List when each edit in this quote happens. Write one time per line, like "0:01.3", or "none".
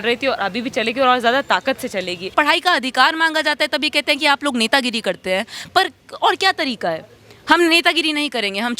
0:02.3